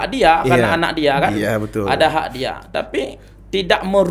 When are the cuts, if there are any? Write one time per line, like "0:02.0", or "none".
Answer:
none